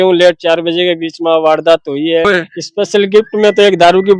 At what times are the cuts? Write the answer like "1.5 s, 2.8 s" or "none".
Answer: 2.2 s